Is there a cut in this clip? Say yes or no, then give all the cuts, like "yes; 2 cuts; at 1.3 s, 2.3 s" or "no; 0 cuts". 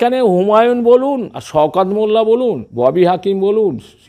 yes; 2 cuts; at 1.3 s, 2.7 s